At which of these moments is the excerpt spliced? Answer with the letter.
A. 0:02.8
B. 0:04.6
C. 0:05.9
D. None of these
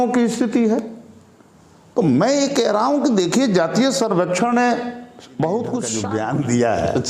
C